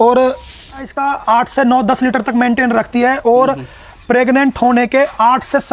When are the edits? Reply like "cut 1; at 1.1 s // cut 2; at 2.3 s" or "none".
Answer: cut 1; at 0.9 s

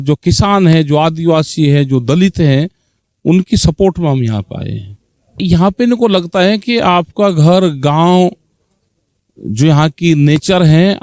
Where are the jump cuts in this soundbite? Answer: cut 1; at 5.4 s

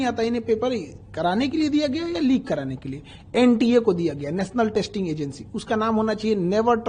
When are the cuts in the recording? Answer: none

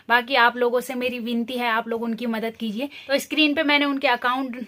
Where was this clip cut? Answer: none

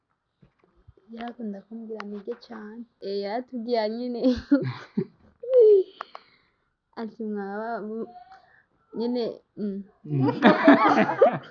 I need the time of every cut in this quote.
cut 1; at 2.9 s

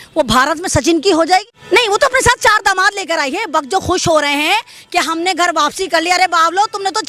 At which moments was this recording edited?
cut 1; at 1.6 s

